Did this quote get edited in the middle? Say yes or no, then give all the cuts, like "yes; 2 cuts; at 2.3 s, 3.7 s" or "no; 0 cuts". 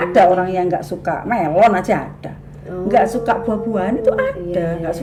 no; 0 cuts